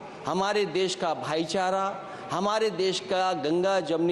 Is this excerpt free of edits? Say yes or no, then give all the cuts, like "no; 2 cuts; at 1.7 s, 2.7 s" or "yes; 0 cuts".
yes; 0 cuts